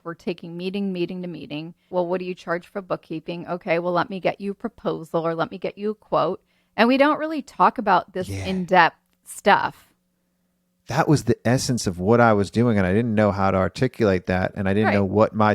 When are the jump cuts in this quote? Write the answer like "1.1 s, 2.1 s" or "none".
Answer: 1.9 s